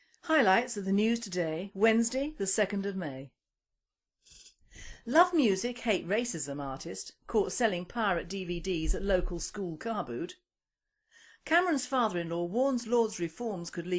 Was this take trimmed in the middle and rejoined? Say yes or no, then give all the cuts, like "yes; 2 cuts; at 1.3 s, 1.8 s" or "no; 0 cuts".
yes; 1 cut; at 5.2 s